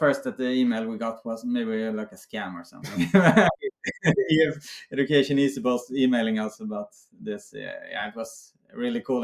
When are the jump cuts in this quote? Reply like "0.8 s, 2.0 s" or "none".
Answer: 3.7 s

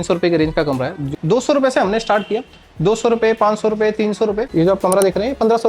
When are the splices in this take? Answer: 1.1 s, 4.4 s

